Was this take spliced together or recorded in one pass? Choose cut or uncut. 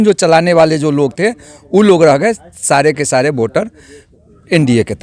uncut